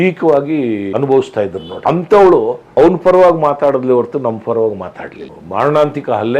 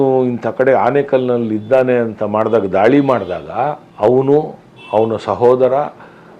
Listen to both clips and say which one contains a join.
first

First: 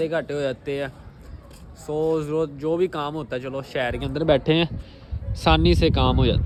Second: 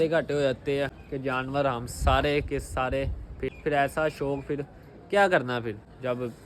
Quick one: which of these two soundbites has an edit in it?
second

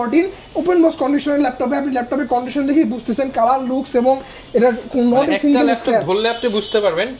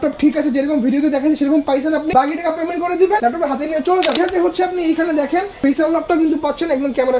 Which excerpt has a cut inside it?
second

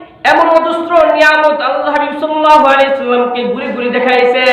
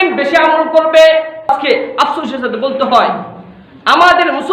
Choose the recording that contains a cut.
second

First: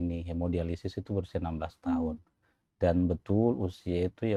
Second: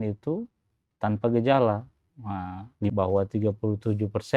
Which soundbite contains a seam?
second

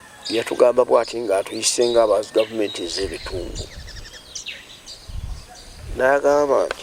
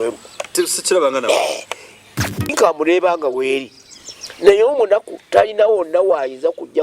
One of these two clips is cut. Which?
second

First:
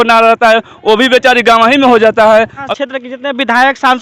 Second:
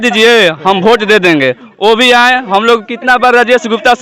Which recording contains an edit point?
first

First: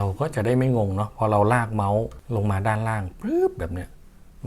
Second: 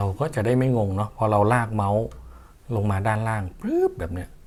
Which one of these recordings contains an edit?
first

